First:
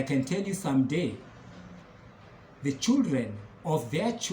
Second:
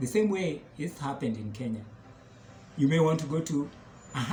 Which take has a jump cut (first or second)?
first